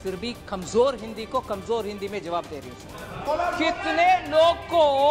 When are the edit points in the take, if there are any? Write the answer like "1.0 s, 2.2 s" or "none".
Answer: 3.2 s